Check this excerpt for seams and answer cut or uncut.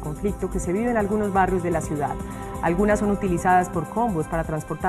cut